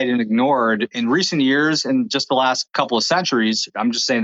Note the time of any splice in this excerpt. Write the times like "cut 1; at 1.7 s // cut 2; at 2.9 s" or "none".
cut 1; at 0.9 s